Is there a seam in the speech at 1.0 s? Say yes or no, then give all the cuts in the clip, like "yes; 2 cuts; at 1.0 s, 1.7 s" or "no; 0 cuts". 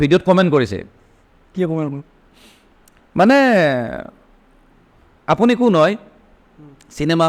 no; 0 cuts